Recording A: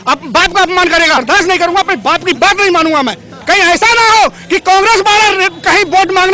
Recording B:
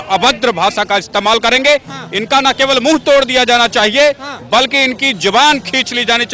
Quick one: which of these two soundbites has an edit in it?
A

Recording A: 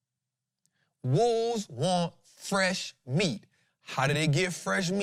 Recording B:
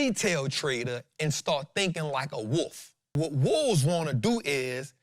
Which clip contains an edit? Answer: B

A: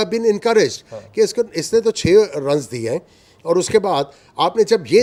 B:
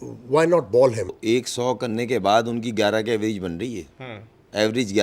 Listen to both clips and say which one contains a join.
B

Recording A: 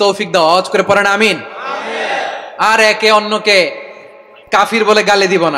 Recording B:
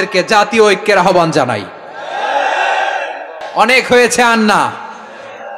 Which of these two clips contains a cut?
B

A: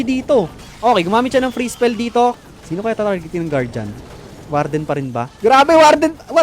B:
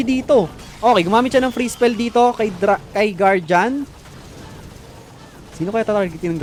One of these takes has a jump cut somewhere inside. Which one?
A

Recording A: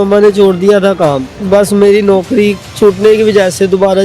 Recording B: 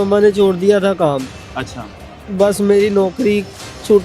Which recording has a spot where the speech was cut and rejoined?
A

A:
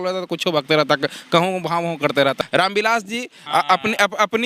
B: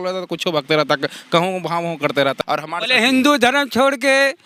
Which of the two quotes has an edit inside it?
A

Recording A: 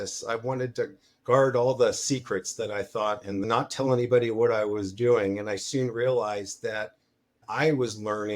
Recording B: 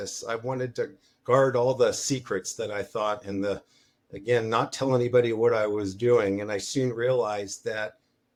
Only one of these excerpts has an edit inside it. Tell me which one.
A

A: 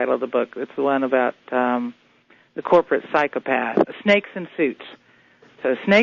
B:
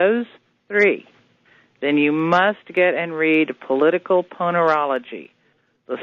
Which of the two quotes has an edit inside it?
A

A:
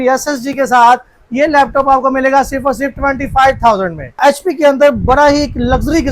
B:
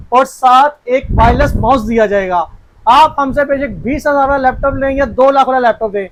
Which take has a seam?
A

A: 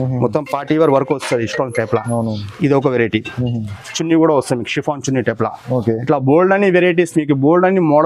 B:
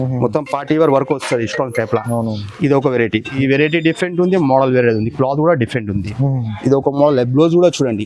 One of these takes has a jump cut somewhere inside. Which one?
B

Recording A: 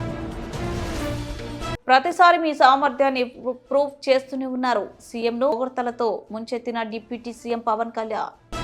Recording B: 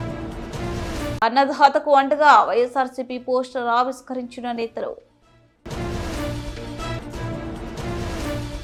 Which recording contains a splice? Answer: A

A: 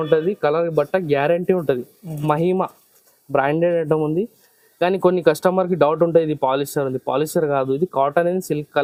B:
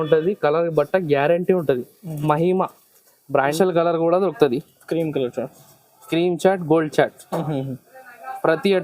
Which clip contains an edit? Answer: B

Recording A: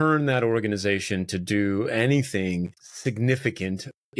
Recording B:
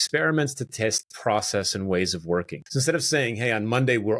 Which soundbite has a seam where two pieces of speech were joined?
B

